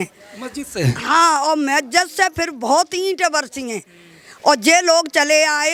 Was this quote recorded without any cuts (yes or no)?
yes